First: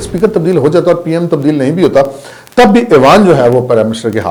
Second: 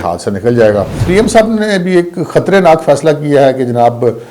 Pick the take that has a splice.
second; 1 cut; at 1.0 s

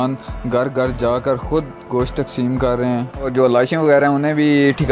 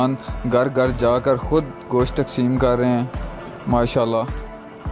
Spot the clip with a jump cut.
first; 1 cut; at 3.3 s

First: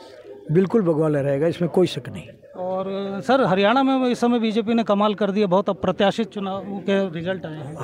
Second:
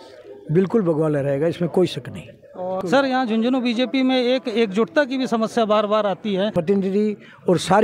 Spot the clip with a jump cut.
second; 2 cuts; at 2.8 s, 6.5 s

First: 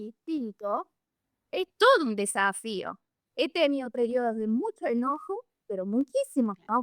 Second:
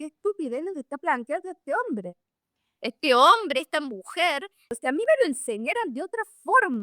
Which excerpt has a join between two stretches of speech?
second; 1 cut; at 4.7 s

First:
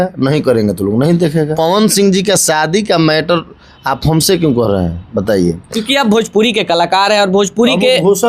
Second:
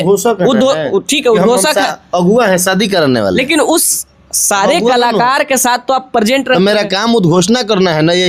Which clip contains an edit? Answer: first; 1 cut; at 1.5 s

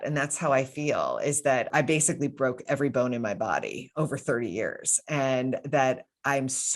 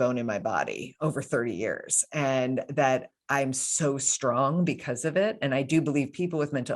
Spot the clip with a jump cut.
first; 1 cut; at 1.7 s

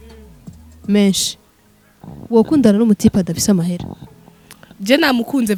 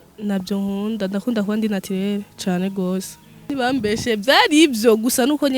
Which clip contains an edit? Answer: second; 1 cut; at 3.5 s

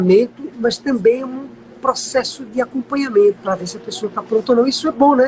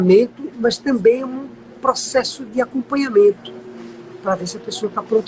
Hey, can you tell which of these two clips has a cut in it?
first; 1 cut; at 3.4 s

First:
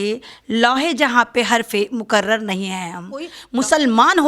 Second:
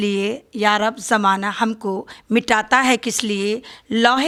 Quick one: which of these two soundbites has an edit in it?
first; 1 cut; at 3.4 s

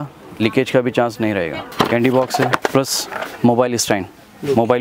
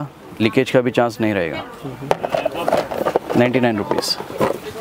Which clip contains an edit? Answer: first; 2 cuts; at 1.6 s, 2.6 s

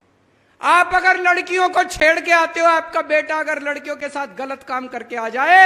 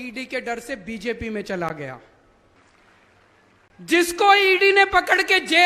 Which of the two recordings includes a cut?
second; 1 cut; at 2.5 s

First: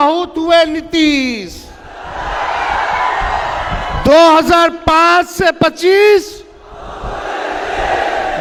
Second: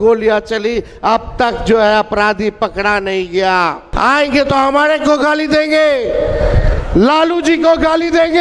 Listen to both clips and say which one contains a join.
second; 1 cut; at 3.9 s

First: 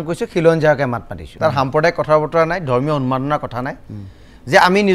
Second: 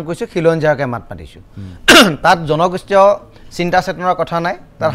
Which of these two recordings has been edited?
first; 1 cut; at 1.2 s

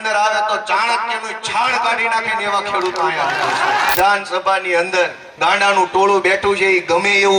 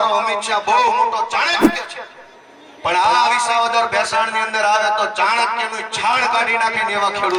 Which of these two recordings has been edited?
first; 2 cuts; at 3.9 s, 5.2 s

